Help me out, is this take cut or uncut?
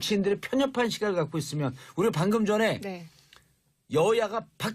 uncut